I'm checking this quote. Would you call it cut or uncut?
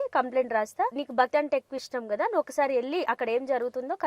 cut